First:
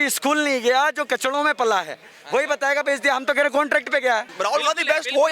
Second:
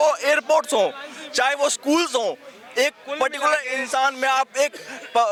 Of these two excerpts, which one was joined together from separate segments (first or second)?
first